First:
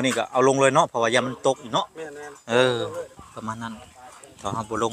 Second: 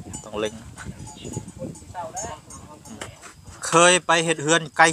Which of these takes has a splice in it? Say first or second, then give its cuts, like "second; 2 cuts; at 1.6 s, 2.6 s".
second; 1 cut; at 3.2 s